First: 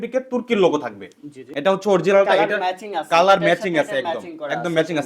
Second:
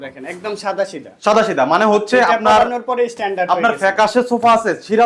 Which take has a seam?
first; 1 cut; at 1.2 s

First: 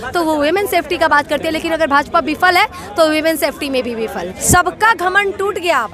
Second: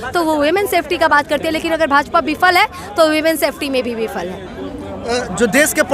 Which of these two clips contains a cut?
first; 1 cut; at 4.3 s

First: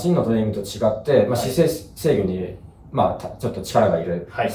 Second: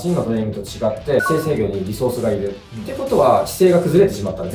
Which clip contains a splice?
second; 1 cut; at 1.2 s

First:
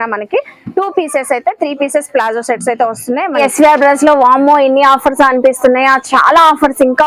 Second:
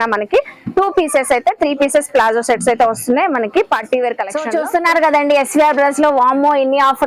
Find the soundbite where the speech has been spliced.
first; 1 cut; at 3.4 s

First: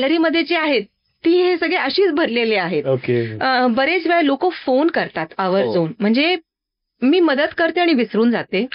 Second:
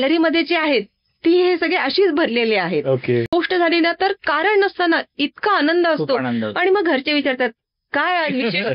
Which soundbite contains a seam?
second; 1 cut; at 3.3 s

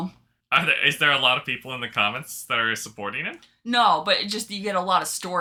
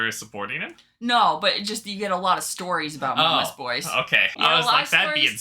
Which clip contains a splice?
second; 1 cut; at 4.3 s

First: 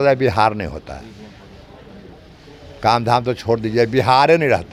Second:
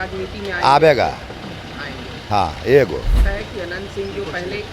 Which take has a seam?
second; 1 cut; at 3.2 s

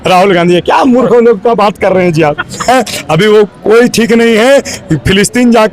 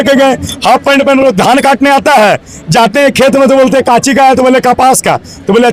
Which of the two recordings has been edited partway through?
first; 1 cut; at 2.7 s

